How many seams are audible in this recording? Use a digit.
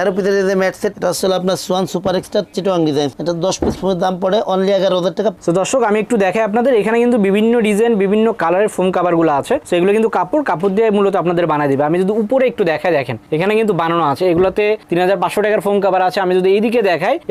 2